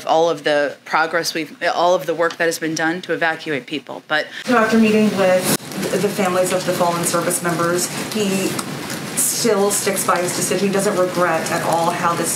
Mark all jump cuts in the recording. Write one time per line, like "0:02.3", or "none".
0:04.3